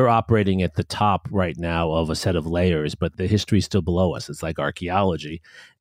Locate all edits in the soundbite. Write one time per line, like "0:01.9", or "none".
0:03.1